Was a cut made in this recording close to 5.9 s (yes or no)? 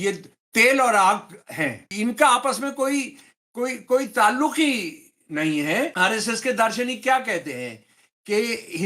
yes